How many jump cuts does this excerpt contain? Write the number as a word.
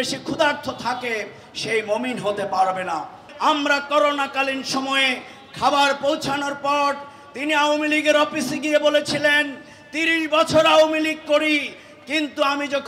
one